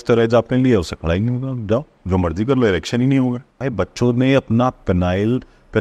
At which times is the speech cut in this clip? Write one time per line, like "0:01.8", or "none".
0:03.6